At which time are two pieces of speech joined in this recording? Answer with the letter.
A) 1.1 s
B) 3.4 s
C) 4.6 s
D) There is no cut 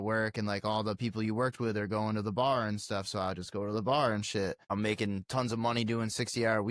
C